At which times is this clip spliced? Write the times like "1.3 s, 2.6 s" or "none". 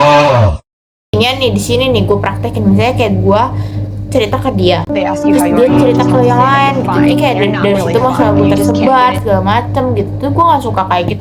none